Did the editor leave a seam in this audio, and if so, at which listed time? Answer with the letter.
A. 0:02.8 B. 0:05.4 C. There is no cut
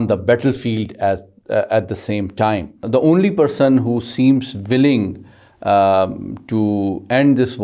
A